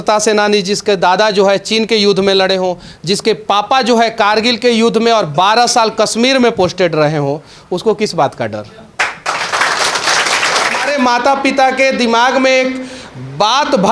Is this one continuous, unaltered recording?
no; 1 cut; at 10.9 s

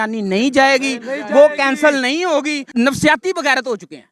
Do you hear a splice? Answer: yes; 1 cut; at 2.6 s

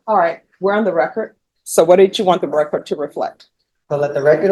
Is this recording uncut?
yes; 0 cuts

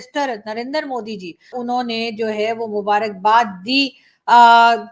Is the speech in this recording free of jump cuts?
no; 1 cut; at 1.5 s

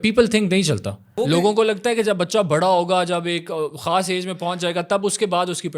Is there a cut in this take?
yes; 1 cut; at 1.1 s

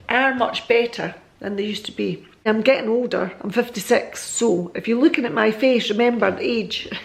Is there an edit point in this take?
yes; 1 cut; at 2.5 s

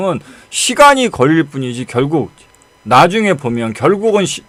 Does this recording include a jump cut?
no; 0 cuts

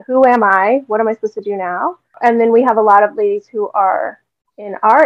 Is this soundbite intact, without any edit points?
no; 1 cut; at 2.1 s

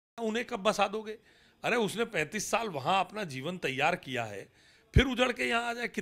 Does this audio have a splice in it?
no; 0 cuts

